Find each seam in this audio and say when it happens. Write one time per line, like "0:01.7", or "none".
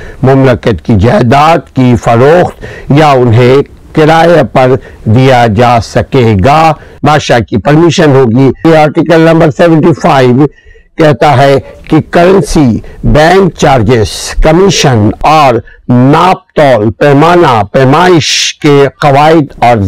0:06.9
0:08.6
0:15.2